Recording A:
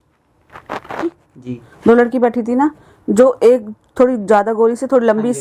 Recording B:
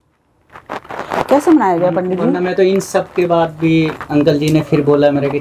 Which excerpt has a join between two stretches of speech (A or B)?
A